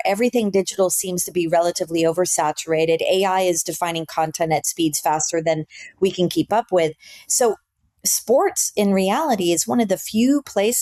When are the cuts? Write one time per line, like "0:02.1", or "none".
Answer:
none